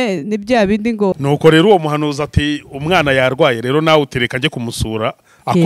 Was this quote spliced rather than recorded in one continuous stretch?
yes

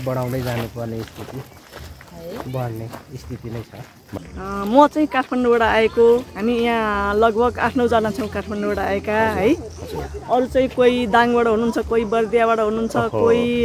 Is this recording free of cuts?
no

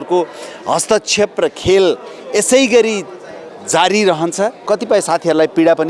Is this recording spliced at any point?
yes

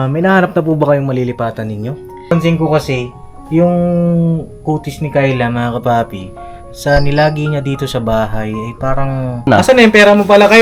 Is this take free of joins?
no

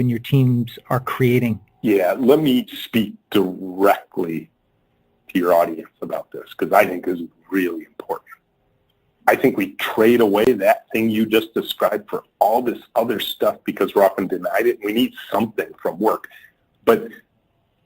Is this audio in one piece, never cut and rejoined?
no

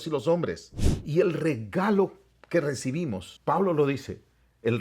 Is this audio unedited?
no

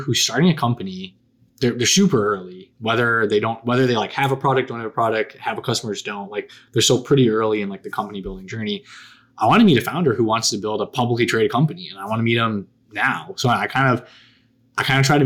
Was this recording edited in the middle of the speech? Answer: no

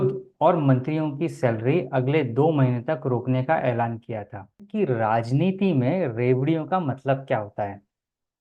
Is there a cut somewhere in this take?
yes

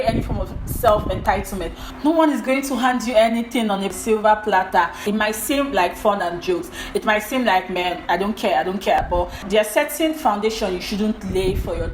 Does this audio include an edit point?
yes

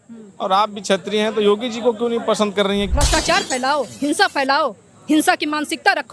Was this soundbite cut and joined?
yes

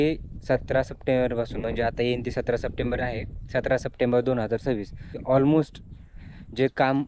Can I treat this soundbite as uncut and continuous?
no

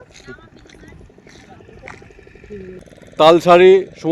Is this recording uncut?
no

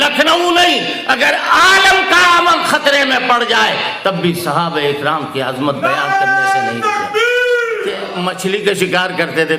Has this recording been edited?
yes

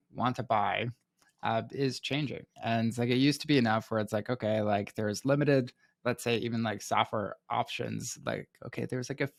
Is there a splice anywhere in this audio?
no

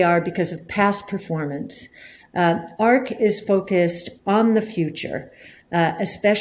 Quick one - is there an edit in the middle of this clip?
no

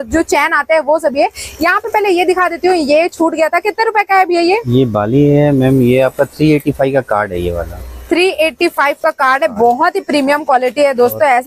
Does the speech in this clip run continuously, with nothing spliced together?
yes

